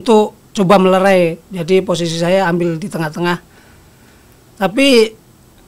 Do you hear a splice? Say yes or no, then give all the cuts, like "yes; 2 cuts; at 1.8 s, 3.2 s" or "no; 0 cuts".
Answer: no; 0 cuts